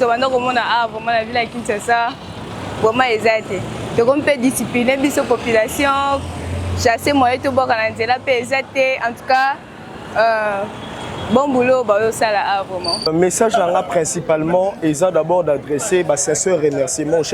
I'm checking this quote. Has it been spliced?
yes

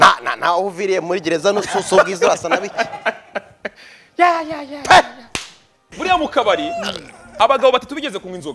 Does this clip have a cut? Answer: yes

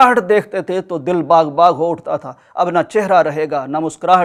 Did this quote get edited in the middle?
no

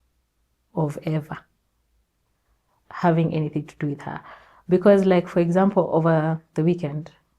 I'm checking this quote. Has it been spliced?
no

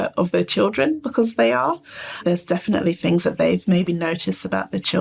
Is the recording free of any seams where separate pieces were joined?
yes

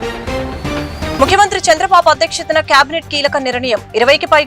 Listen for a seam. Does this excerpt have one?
yes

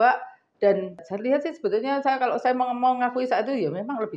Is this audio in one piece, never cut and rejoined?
no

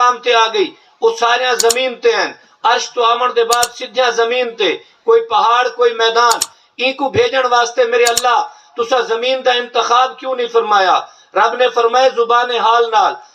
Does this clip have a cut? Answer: no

